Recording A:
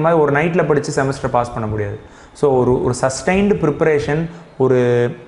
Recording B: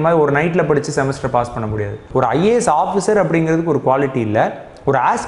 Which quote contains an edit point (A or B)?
B